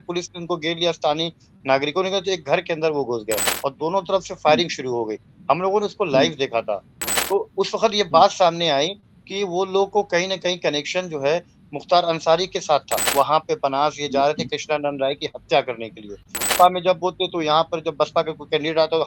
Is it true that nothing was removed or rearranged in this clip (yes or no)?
no